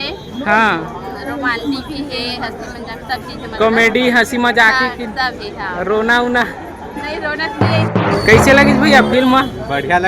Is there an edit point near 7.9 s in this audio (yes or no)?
yes